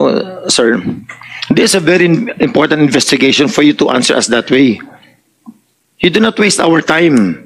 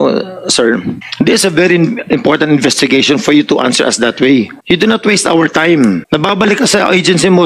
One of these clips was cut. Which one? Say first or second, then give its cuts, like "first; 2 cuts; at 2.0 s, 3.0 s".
second; 3 cuts; at 1.0 s, 4.6 s, 6.0 s